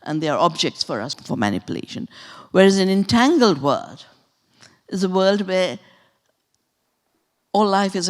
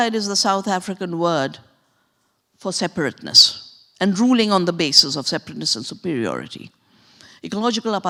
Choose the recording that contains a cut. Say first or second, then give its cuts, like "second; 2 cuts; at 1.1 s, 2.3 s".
first; 1 cut; at 1.2 s